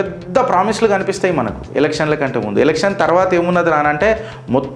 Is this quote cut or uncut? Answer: uncut